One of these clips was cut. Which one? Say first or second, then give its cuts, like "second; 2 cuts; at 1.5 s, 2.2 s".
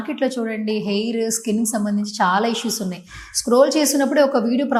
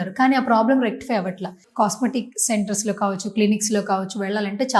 second; 1 cut; at 1.6 s